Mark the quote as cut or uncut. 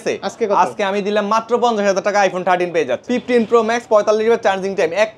cut